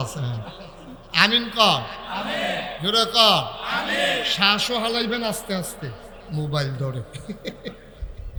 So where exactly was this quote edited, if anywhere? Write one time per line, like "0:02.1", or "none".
none